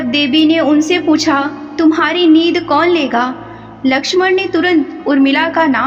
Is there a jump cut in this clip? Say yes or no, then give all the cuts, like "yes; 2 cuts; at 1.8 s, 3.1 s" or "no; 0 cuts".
no; 0 cuts